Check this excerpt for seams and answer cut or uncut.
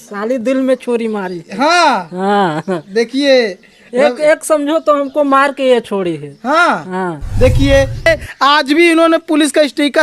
cut